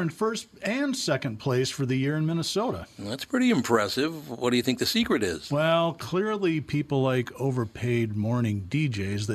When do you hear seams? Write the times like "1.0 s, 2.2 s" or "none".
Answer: none